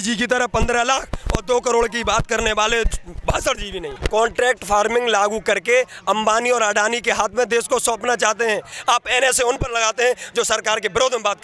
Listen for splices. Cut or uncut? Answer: cut